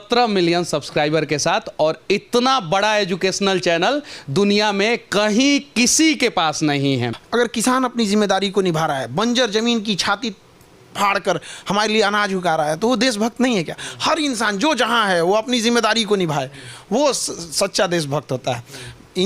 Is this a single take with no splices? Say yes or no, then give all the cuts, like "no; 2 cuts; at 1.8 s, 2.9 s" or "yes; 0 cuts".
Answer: no; 1 cut; at 7.2 s